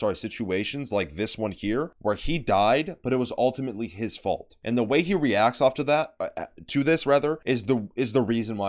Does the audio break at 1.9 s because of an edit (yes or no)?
yes